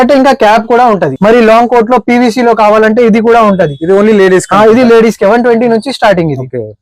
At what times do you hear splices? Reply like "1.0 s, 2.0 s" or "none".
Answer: 1.1 s